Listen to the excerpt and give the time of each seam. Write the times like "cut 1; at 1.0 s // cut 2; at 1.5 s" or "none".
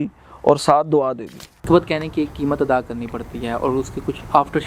cut 1; at 1.6 s